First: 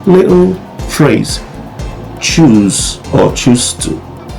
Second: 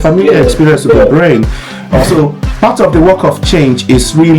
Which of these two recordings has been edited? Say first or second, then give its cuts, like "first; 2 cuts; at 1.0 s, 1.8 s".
second; 1 cut; at 1.9 s